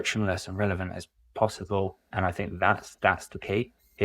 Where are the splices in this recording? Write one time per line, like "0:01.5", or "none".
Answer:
0:02.0